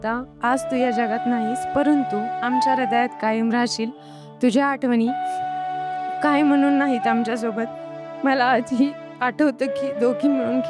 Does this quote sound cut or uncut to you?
uncut